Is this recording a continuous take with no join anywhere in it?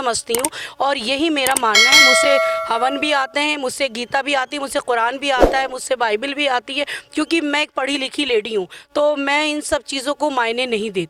yes; 0 cuts

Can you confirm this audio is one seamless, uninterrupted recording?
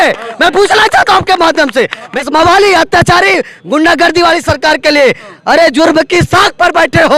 yes; 0 cuts

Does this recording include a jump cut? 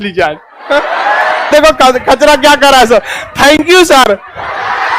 yes; 1 cut; at 1.5 s

